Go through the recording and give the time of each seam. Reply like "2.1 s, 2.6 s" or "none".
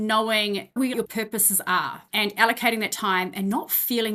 0.9 s, 2.0 s